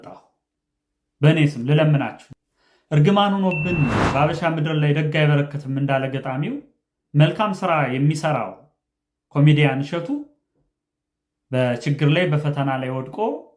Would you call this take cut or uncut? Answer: cut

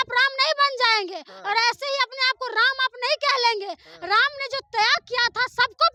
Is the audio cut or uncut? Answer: uncut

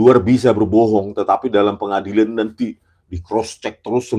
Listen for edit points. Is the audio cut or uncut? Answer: uncut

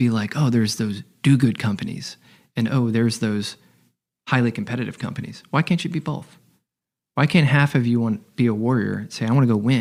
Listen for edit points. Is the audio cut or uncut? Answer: uncut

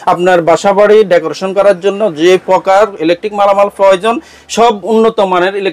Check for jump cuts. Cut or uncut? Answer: uncut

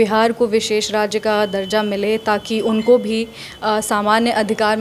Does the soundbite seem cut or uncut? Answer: uncut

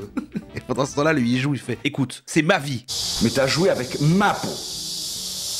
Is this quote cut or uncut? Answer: cut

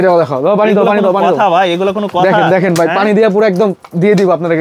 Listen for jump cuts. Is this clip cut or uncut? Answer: uncut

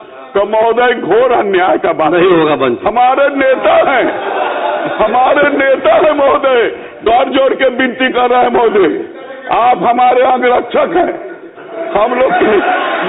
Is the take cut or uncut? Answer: cut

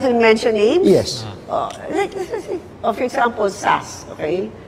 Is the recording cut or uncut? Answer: cut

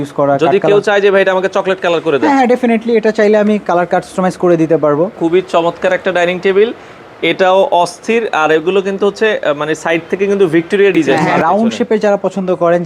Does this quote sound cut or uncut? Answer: cut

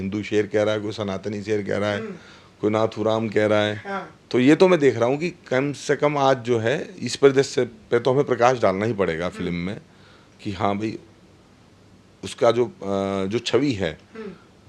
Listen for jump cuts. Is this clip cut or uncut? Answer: uncut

